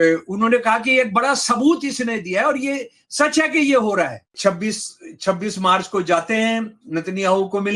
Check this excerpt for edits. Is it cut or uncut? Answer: cut